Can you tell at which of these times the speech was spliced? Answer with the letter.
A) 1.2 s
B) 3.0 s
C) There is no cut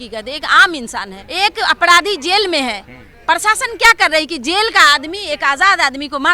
A